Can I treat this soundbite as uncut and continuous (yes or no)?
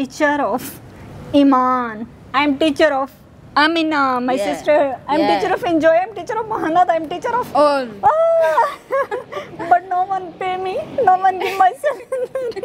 yes